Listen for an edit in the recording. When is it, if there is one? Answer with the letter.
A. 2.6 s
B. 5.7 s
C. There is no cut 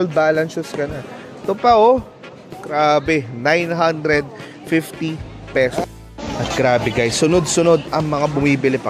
B